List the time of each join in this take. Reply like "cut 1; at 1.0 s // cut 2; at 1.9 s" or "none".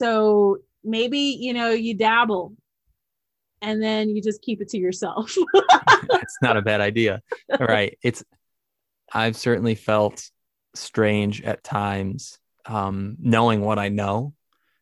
none